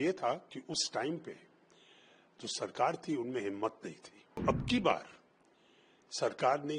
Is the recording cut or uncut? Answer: cut